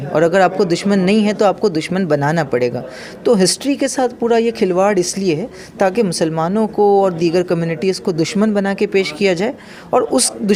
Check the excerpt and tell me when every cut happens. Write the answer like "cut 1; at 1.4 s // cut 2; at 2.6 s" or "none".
none